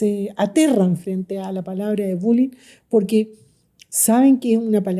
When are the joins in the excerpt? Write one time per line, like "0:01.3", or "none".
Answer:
none